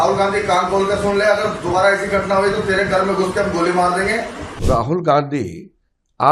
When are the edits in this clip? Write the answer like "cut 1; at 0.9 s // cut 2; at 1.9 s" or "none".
cut 1; at 4.5 s